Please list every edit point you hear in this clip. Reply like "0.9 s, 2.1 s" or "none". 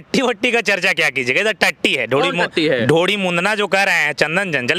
none